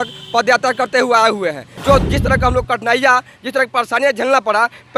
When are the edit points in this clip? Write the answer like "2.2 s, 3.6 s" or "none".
1.8 s